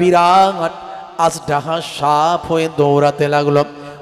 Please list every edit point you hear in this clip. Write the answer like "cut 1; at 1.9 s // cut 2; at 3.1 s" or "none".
none